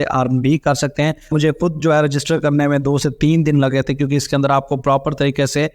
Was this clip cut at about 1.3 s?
yes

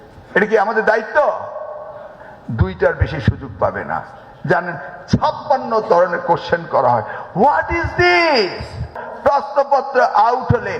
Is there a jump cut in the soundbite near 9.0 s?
yes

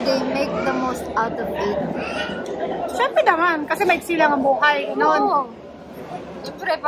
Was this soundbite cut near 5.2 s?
no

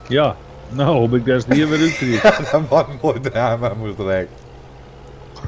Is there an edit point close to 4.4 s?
no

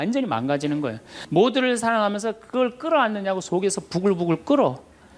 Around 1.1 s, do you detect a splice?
yes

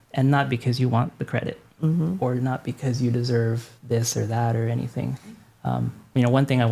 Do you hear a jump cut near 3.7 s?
no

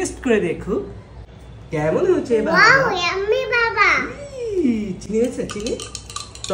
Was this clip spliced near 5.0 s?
no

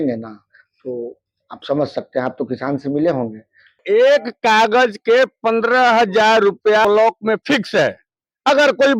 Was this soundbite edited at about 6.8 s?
yes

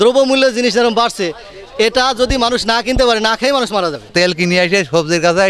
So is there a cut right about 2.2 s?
no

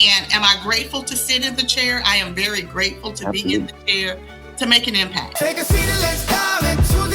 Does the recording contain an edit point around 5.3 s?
yes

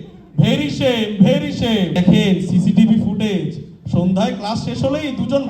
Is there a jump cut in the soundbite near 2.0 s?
yes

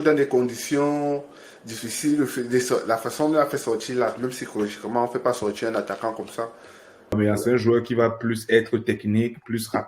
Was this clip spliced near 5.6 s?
no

